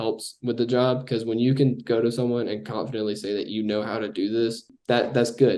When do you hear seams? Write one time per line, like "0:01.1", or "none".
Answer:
0:04.7